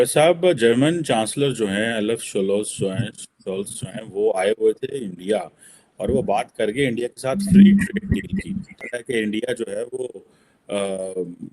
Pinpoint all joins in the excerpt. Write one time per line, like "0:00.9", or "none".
0:08.8